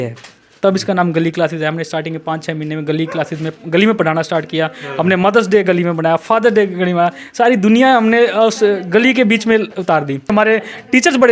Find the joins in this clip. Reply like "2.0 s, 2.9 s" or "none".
10.3 s